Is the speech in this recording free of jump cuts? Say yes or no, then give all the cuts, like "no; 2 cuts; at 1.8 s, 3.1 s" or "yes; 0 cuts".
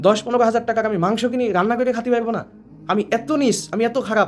yes; 0 cuts